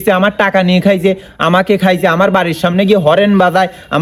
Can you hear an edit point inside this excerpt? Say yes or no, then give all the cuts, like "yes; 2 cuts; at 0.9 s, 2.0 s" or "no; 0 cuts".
no; 0 cuts